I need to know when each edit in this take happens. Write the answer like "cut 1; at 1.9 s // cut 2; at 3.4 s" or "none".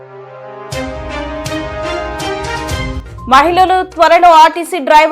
cut 1; at 3.0 s